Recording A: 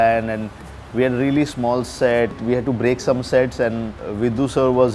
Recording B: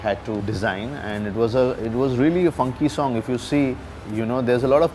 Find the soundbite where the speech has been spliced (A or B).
A